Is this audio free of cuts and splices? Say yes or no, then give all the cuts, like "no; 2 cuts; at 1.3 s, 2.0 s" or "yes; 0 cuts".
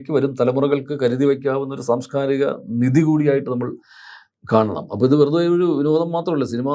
yes; 0 cuts